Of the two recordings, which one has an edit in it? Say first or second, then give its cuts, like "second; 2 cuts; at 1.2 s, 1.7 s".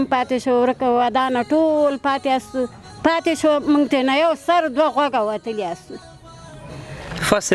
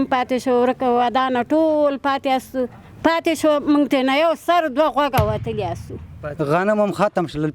second; 1 cut; at 6.2 s